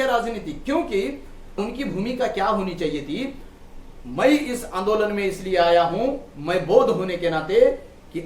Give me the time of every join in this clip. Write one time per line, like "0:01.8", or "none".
0:01.6